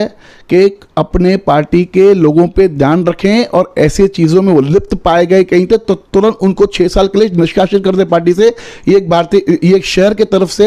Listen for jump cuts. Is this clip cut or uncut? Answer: uncut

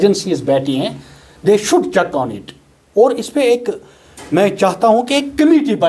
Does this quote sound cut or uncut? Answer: uncut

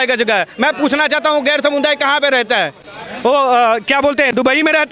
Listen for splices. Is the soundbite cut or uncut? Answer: uncut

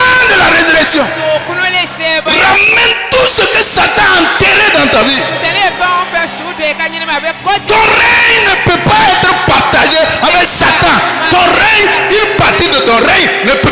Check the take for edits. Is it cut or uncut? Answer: uncut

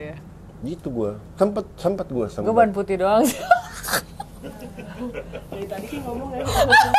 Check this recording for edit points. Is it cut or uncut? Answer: uncut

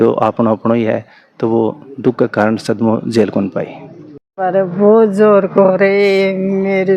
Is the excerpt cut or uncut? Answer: uncut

